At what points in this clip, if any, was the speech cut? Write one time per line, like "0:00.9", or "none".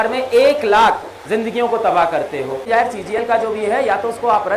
0:02.6